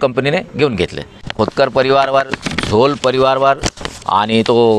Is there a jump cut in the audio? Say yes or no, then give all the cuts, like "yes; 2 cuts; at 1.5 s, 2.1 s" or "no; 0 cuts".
yes; 1 cut; at 1.3 s